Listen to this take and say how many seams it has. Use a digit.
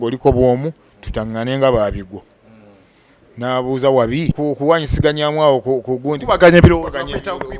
1